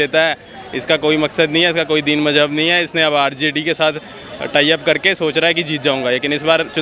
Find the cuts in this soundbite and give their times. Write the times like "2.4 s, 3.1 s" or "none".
none